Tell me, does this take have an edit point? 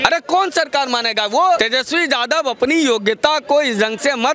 yes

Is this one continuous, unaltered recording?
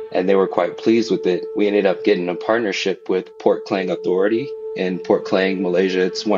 yes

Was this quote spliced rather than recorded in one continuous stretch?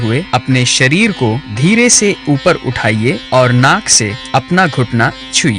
yes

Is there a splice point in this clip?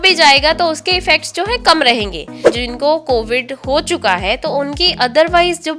yes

